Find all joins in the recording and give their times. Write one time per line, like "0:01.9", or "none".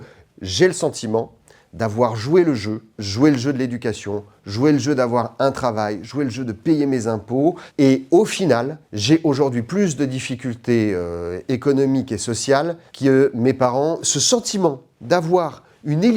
0:02.9
0:14.1